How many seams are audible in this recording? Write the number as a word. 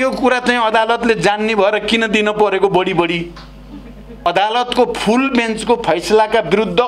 one